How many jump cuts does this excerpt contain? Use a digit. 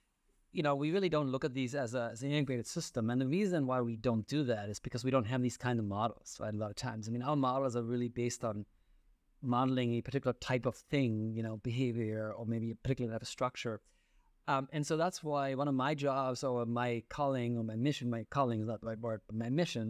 0